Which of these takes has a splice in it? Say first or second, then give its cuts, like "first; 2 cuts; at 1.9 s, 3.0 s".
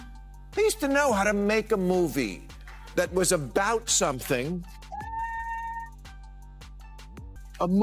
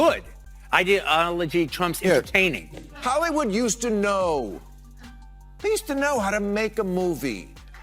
second; 1 cut; at 2.6 s